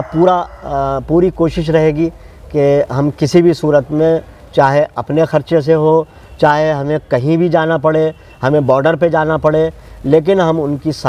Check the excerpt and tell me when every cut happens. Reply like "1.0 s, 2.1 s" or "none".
none